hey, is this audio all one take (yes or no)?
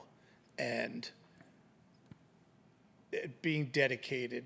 yes